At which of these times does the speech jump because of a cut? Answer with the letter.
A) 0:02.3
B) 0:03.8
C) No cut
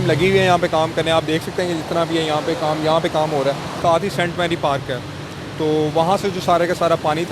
B